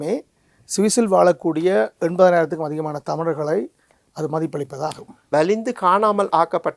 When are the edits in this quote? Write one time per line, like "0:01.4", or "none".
0:05.1